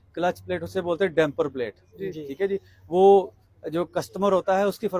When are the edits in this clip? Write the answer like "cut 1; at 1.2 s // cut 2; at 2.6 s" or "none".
none